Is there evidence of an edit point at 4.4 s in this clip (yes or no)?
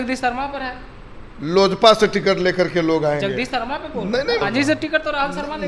yes